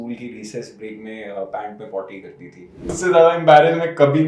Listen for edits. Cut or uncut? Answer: cut